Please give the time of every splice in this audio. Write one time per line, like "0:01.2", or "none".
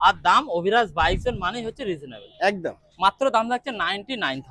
none